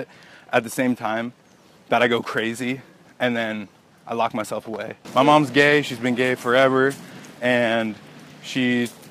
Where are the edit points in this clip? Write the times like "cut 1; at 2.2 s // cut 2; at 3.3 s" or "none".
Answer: cut 1; at 5.0 s